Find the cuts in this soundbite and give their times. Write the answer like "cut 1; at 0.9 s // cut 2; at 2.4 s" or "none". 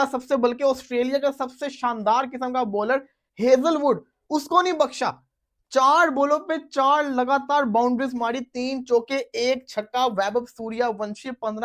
none